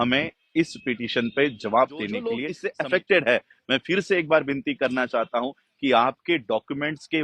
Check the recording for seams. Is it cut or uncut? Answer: cut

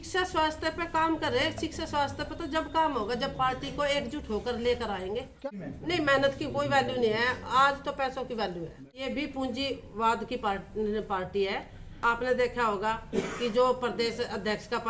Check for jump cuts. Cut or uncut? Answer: cut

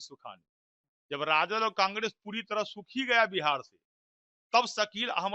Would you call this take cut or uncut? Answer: uncut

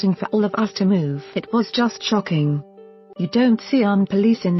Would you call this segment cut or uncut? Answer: uncut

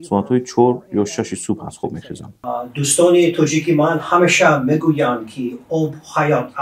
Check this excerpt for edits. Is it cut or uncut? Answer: cut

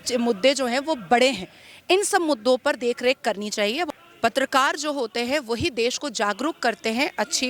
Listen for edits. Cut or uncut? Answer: cut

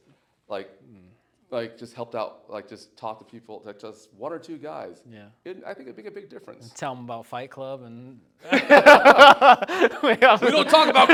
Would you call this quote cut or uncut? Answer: uncut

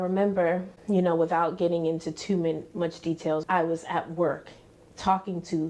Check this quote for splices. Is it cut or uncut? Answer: cut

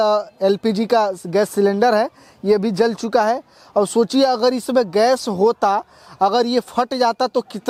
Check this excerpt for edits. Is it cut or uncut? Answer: uncut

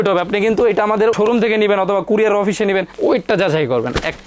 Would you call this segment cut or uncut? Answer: cut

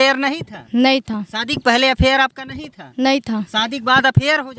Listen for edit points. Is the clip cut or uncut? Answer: uncut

